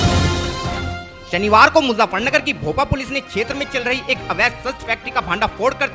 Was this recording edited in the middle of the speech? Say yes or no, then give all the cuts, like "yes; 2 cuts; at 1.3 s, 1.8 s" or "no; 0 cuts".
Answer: no; 0 cuts